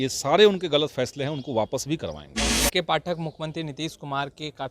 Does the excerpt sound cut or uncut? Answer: cut